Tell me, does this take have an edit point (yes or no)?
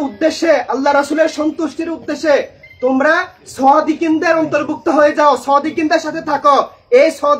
no